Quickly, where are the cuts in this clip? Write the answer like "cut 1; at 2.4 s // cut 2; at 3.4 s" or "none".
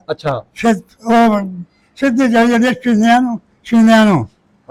none

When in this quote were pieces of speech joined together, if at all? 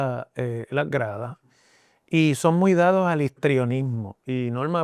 none

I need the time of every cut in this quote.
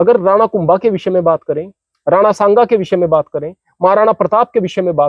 none

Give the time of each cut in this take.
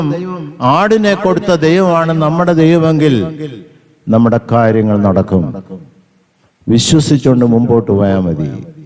none

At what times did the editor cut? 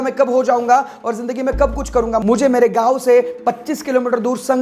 cut 1; at 2.2 s

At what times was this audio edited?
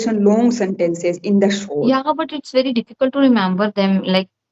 cut 1; at 1.8 s

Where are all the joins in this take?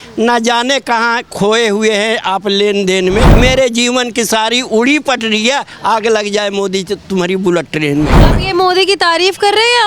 cut 1; at 3.3 s // cut 2; at 8.3 s

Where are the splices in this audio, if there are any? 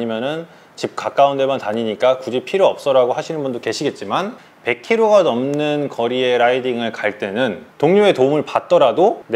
cut 1; at 4.4 s // cut 2; at 7.7 s

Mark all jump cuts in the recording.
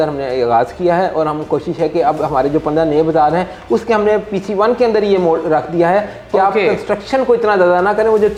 none

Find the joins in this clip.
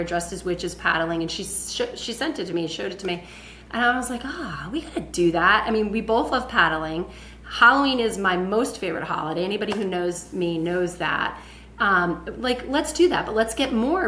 none

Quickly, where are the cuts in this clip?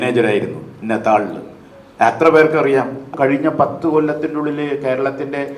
cut 1; at 3.1 s

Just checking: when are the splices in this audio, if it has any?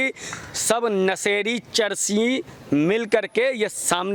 none

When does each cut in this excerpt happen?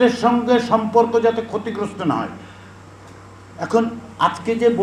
none

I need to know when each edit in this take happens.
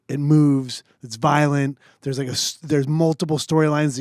none

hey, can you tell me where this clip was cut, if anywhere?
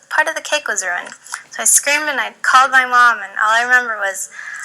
cut 1; at 1.8 s

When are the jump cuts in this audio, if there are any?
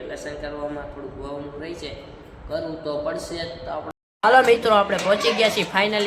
cut 1; at 4.1 s

